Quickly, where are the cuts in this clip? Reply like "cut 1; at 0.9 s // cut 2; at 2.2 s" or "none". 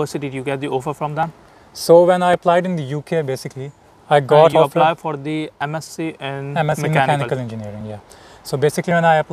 none